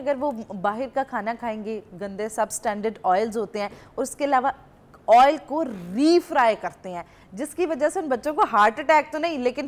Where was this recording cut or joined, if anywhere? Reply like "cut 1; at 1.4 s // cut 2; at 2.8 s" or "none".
none